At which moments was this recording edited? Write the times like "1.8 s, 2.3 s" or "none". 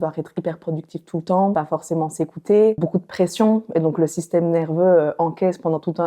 1.5 s, 2.8 s